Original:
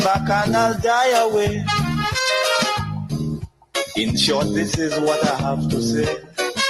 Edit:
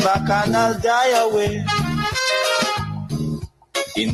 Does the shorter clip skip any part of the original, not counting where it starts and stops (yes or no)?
no